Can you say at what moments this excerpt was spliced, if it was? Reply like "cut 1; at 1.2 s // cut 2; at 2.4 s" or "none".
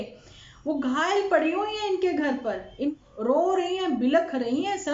cut 1; at 2.9 s